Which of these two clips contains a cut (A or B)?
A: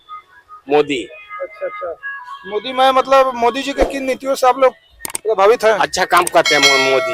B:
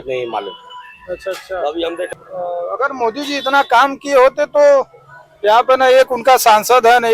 B